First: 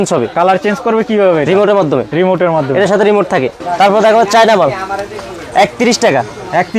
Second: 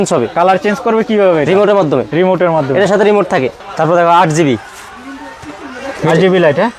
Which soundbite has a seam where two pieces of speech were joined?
first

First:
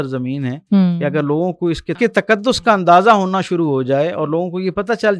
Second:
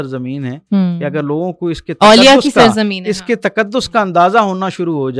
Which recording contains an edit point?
first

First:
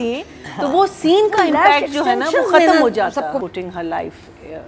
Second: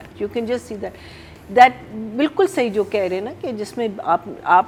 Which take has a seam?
first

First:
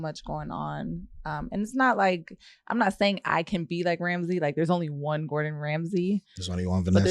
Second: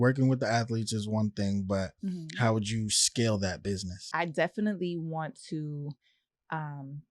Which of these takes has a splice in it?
second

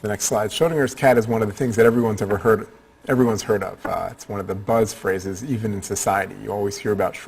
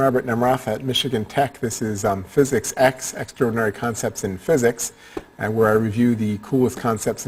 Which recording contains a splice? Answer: first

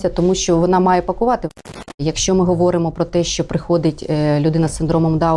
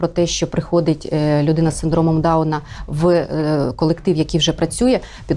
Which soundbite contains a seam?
first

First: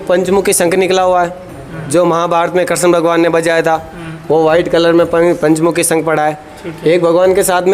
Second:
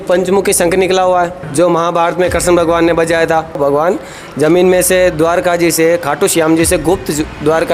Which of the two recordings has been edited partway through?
second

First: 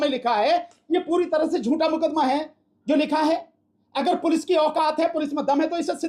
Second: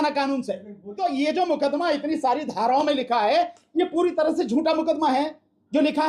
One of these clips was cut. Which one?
second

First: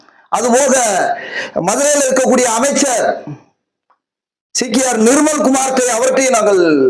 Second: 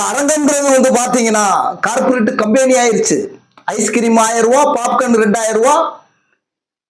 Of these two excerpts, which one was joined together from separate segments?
second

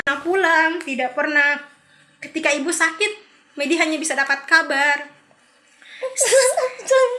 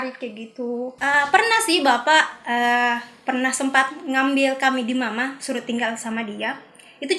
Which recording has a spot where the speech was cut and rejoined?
second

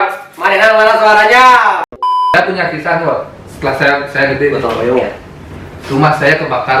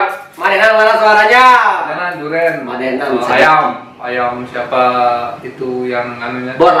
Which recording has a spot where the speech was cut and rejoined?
first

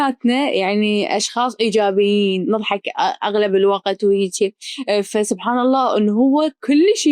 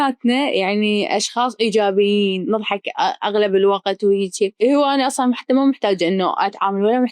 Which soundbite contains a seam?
second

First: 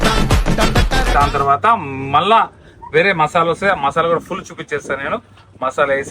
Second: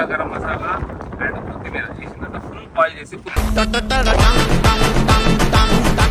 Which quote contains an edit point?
first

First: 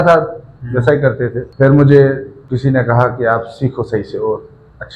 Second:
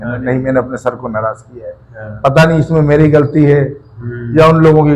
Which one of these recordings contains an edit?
first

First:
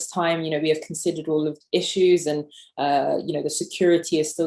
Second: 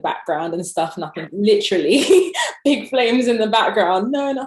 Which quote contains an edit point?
first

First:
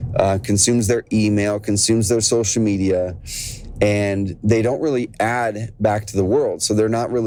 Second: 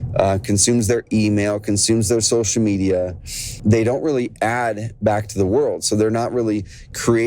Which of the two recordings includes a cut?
second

